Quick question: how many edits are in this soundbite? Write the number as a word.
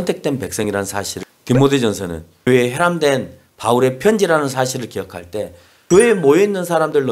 three